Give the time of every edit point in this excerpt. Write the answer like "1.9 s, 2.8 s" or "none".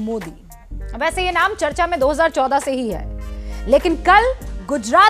none